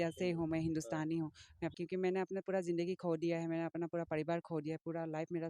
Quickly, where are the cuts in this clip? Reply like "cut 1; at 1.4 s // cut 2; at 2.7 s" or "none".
cut 1; at 1.7 s